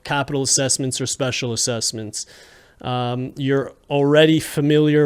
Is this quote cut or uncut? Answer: uncut